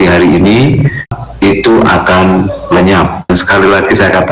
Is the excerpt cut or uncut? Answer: cut